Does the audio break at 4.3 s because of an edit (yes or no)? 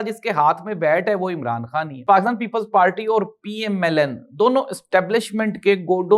no